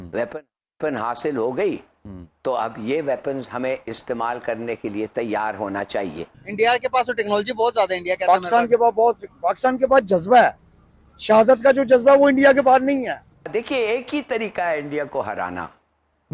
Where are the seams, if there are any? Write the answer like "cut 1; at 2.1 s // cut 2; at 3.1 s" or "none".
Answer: cut 1; at 6.4 s // cut 2; at 13.5 s